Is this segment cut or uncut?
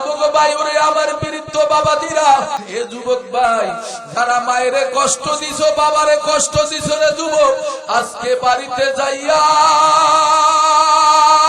cut